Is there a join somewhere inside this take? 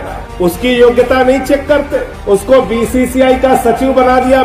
no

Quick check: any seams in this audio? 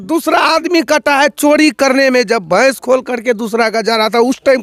no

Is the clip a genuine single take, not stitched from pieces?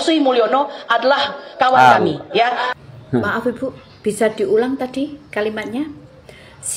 yes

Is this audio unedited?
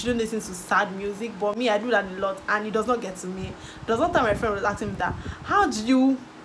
yes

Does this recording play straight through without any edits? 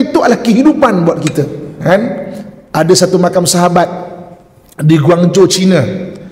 no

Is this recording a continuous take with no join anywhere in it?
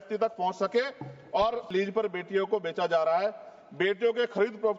no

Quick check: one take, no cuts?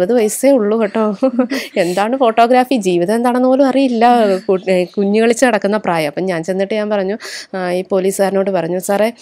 yes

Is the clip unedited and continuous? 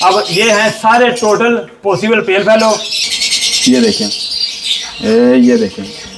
no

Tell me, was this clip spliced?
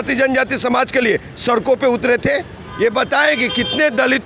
yes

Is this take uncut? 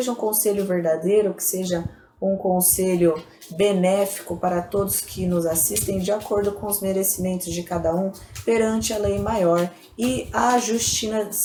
yes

